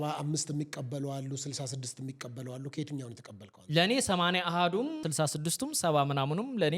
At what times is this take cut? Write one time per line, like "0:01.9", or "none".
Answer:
0:05.0